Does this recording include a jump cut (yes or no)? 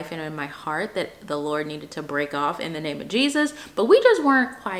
no